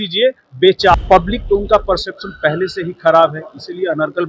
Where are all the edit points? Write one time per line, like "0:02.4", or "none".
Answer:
0:00.9